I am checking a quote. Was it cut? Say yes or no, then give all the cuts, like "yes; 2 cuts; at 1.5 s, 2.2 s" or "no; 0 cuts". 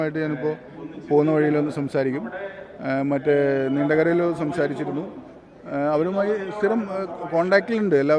no; 0 cuts